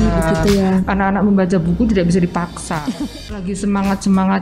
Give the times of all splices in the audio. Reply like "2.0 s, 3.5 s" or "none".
3.0 s